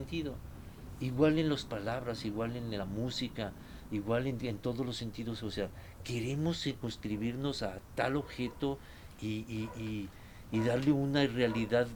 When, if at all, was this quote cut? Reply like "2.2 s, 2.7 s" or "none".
none